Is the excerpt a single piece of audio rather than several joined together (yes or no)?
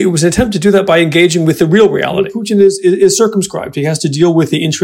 no